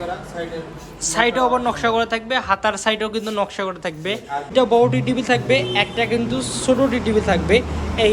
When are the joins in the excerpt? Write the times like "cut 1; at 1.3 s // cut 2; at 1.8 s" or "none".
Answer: cut 1; at 4.5 s